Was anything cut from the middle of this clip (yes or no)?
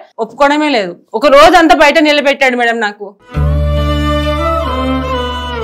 no